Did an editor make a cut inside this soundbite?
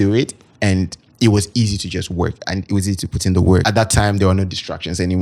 yes; 1 cut; at 3.6 s

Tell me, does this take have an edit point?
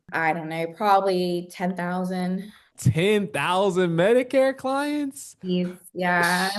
yes; 1 cut; at 2.6 s

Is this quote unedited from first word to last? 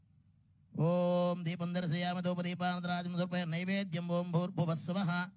yes; 0 cuts

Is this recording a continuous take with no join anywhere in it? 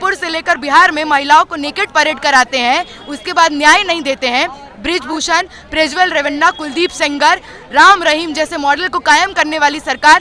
yes; 0 cuts

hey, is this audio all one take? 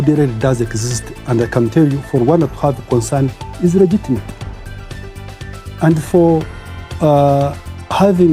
yes; 0 cuts

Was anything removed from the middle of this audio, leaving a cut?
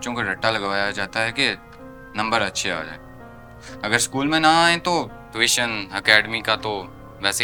no; 0 cuts

